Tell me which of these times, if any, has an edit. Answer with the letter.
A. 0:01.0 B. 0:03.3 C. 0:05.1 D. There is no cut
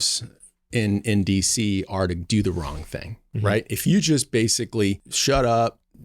C